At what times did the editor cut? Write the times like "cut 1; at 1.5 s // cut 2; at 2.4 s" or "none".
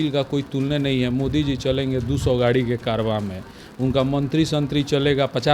none